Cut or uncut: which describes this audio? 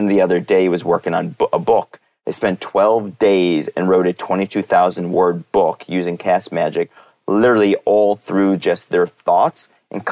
uncut